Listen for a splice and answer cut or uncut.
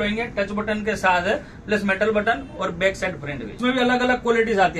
cut